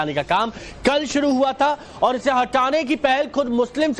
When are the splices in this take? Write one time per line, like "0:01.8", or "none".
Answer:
0:02.8